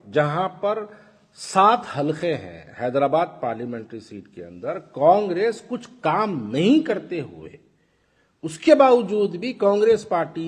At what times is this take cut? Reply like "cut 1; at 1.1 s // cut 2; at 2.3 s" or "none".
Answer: none